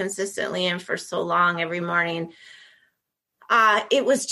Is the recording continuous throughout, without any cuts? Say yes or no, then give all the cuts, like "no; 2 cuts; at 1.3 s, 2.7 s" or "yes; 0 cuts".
yes; 0 cuts